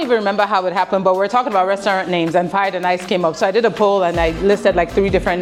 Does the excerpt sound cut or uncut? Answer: uncut